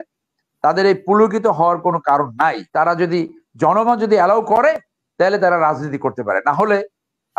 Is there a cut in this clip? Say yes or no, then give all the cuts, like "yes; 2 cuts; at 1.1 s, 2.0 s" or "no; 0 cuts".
yes; 1 cut; at 2.6 s